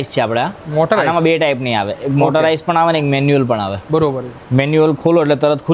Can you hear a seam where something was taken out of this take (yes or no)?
no